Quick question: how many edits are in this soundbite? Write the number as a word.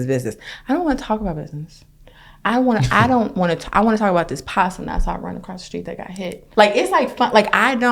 one